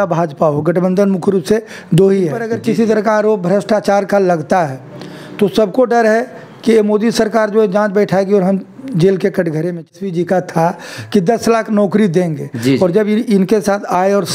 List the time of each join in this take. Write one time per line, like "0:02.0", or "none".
0:02.5
0:09.9